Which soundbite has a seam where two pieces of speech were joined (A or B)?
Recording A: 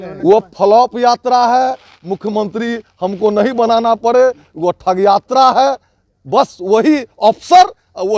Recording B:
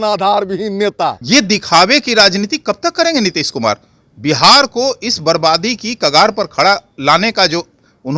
B